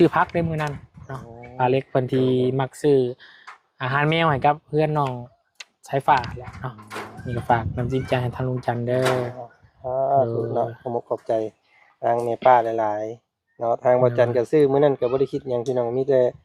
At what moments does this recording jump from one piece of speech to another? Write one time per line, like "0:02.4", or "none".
none